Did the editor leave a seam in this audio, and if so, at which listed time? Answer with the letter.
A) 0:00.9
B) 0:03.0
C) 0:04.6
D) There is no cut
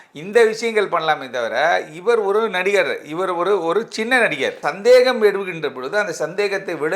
C